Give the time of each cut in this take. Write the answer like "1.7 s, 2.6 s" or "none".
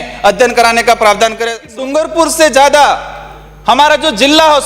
1.7 s